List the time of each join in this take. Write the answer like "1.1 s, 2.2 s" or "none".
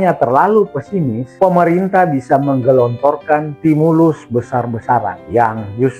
1.2 s, 3.5 s, 5.2 s

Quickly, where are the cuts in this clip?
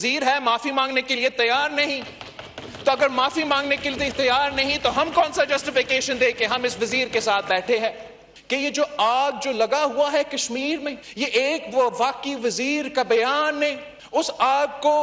8.3 s

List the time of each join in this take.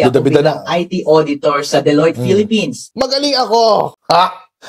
2.9 s

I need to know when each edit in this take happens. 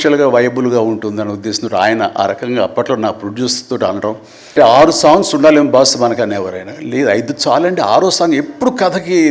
4.5 s

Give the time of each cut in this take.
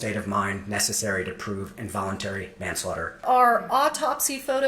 3.2 s

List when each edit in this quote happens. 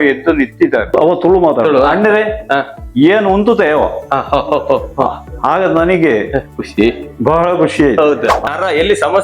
0.9 s, 8.5 s

